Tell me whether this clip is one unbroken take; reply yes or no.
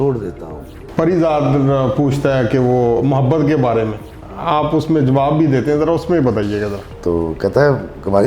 no